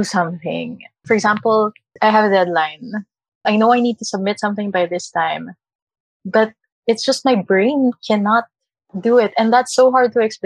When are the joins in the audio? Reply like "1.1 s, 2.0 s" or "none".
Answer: none

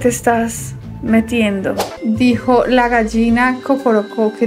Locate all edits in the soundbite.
1.9 s

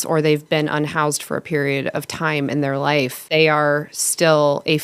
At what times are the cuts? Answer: 3.3 s

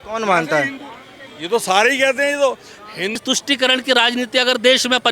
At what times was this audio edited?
3.2 s

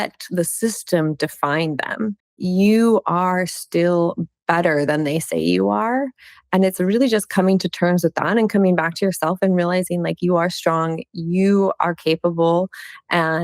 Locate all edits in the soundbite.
2.3 s

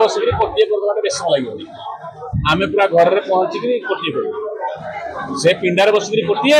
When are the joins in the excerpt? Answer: none

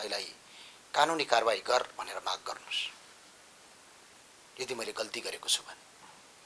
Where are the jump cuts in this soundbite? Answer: none

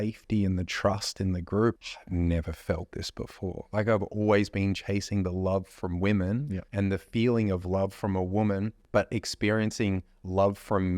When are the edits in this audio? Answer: 1.8 s, 6.6 s, 8.8 s

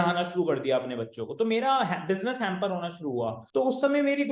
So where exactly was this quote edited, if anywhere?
3.4 s

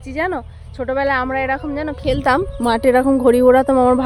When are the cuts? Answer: none

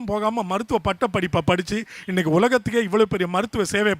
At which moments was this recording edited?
none

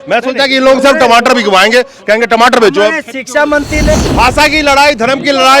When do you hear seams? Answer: 3.9 s

